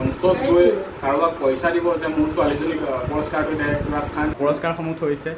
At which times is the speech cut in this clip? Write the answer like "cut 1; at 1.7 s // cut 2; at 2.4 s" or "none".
cut 1; at 4.3 s